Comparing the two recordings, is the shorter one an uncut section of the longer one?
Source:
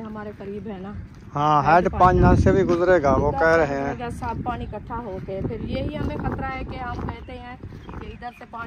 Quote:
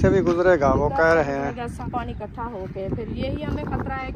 no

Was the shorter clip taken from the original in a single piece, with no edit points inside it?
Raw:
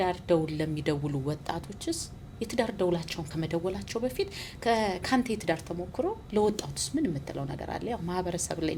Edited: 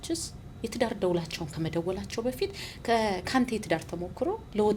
yes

